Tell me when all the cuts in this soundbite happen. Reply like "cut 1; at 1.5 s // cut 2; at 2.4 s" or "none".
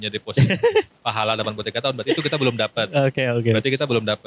none